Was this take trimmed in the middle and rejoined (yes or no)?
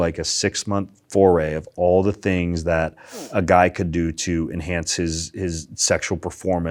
no